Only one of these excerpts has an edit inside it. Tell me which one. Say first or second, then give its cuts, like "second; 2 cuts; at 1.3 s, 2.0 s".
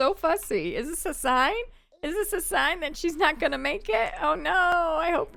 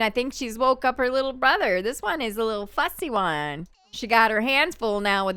second; 1 cut; at 3.7 s